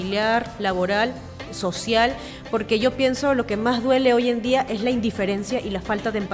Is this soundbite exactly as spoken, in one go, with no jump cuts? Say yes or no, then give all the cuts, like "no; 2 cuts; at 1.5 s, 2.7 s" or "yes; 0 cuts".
no; 1 cut; at 2.3 s